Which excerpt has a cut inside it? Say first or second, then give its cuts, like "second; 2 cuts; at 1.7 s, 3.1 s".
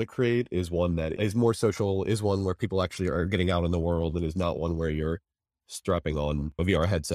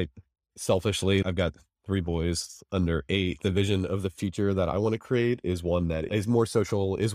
second; 2 cuts; at 1.2 s, 3.4 s